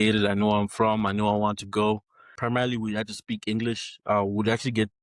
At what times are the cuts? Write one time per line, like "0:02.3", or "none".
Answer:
0:02.3